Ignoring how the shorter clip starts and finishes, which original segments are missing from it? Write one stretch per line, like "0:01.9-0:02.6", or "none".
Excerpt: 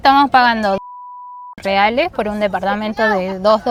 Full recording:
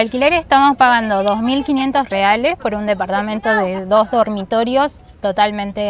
none

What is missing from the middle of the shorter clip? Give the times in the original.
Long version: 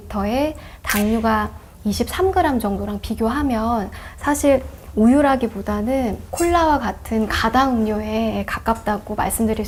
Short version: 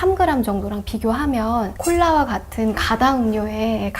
0:03.9-0:06.3

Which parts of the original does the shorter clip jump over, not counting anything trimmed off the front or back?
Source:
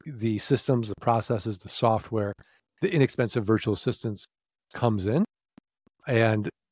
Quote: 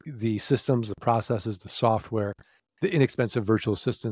none

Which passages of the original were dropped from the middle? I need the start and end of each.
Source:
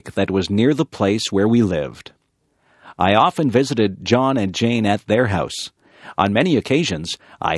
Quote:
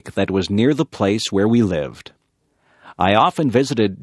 none

